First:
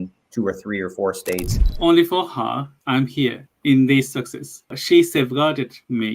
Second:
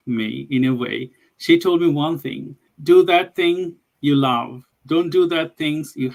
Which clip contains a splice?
first; 2 cuts; at 1.6 s, 3.5 s

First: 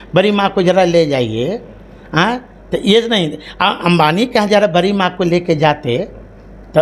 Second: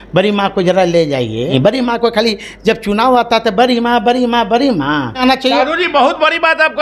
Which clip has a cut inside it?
second; 2 cuts; at 1.5 s, 5.2 s

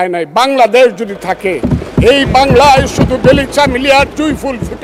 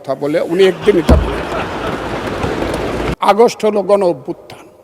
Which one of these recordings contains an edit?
second; 1 cut; at 3.1 s

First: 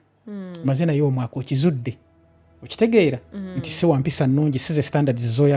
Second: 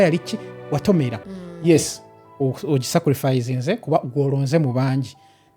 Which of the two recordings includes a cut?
second; 1 cut; at 1.2 s

